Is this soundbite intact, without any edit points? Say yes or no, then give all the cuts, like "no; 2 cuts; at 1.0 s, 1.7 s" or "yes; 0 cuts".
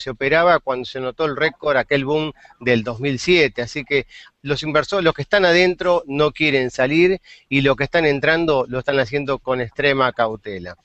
yes; 0 cuts